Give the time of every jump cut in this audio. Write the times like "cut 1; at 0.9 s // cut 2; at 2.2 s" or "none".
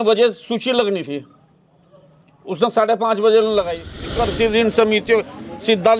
cut 1; at 4.1 s